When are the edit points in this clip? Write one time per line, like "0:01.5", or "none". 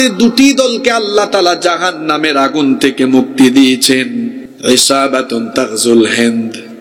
0:04.4